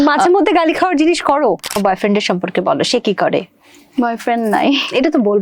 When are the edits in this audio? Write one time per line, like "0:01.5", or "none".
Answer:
0:01.7